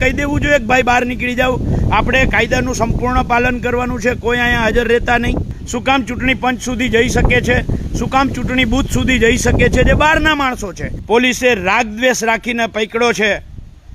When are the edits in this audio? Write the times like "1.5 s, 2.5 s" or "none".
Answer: 5.6 s, 10.9 s